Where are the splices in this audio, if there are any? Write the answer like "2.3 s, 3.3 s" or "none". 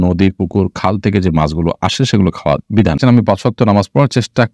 3.0 s